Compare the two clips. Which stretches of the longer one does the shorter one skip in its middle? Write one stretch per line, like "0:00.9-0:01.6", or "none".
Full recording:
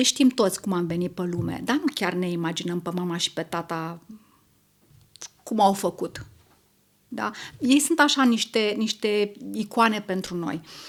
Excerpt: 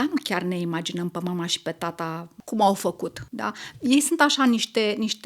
0:04.0-0:05.3
0:06.2-0:07.0